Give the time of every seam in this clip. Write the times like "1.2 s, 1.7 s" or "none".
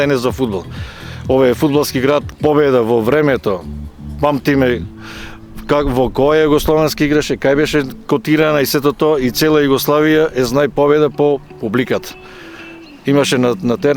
2.3 s